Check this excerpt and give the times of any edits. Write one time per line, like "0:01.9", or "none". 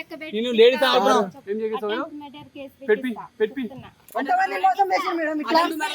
0:01.4